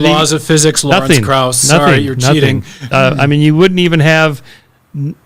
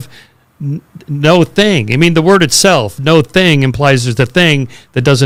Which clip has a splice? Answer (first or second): first